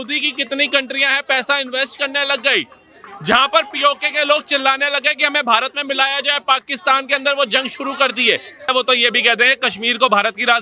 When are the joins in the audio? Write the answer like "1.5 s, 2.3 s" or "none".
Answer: 8.7 s

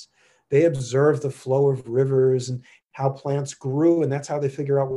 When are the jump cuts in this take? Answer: none

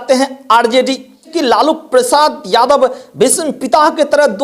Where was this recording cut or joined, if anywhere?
1.3 s

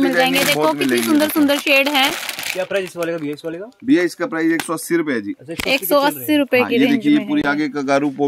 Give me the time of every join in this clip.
none

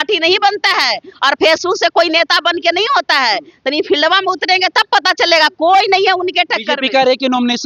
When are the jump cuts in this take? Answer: none

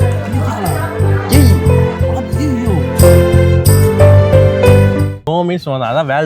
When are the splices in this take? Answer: 5.2 s

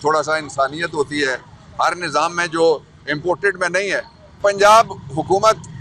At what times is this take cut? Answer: 4.4 s

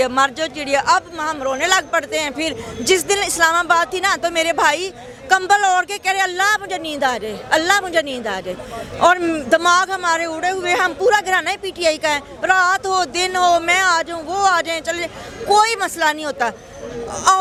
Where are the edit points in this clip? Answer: none

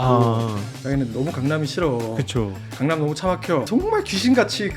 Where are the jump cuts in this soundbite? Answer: 3.7 s

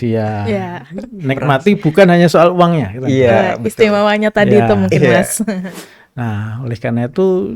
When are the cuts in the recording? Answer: 5.7 s

